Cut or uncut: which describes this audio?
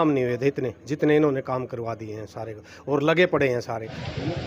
uncut